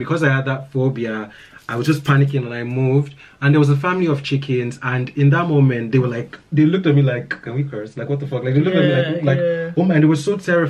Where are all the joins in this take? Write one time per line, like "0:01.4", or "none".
none